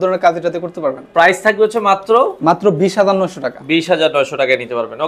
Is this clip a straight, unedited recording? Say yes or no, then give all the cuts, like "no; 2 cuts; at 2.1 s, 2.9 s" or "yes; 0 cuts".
yes; 0 cuts